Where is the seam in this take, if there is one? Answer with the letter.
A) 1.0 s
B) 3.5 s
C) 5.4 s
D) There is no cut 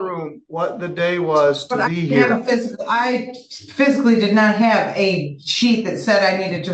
D